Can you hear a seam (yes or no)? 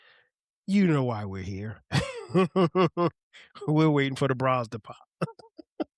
no